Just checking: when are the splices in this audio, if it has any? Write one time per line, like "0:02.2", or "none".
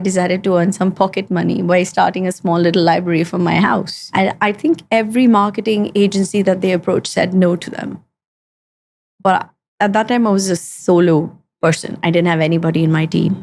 0:04.0